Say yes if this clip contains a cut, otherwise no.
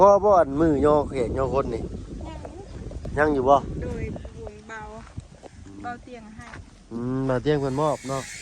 no